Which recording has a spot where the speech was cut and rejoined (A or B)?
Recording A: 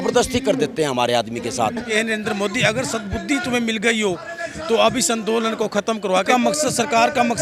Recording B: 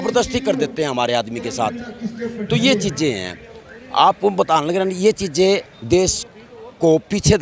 A